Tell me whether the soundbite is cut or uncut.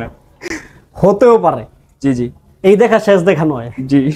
uncut